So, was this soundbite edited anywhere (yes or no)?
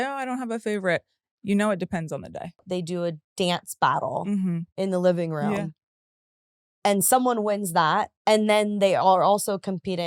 yes